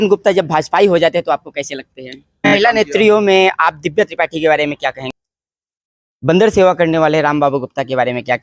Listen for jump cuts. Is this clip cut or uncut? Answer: cut